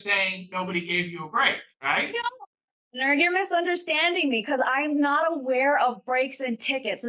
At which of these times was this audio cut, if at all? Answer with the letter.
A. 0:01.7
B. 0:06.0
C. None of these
A